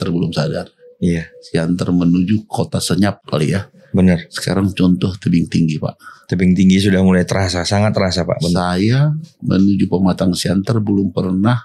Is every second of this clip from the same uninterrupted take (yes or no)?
yes